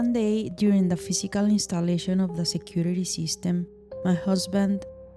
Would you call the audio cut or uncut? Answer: uncut